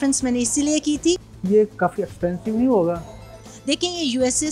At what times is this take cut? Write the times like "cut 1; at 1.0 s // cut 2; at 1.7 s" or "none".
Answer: none

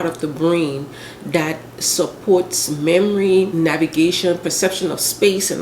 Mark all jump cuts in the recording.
cut 1; at 3.5 s

